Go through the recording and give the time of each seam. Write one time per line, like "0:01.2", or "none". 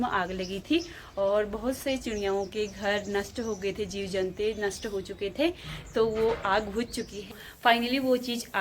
0:07.4